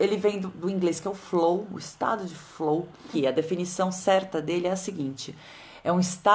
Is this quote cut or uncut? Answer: cut